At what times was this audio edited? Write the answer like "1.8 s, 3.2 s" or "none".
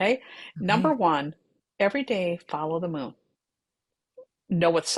none